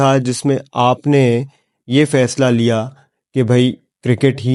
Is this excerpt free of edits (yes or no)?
yes